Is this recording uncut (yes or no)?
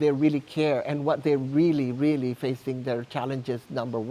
yes